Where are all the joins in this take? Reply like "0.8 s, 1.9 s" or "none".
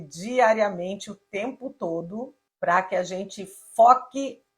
2.4 s